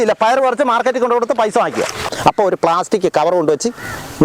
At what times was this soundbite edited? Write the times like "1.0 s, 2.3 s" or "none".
2.1 s